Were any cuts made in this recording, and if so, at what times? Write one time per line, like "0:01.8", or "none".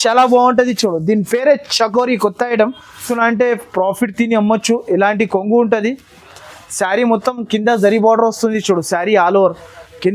0:03.1